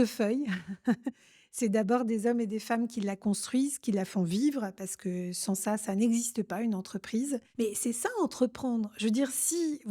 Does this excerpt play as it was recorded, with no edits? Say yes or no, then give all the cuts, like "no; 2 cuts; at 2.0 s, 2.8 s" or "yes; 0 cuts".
no; 1 cut; at 7.5 s